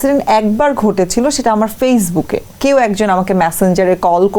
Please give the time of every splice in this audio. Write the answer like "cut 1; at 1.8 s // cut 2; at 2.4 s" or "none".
cut 1; at 2.5 s